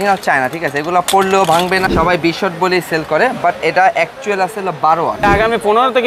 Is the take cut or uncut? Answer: cut